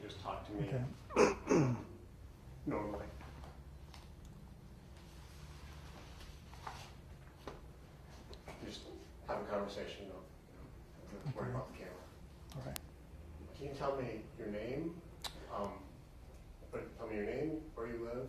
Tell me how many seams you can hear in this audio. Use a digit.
1